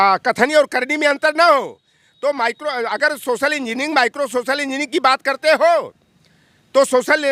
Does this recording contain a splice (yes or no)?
no